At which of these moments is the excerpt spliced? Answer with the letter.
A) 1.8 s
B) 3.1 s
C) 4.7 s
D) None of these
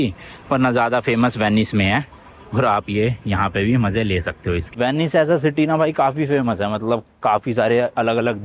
D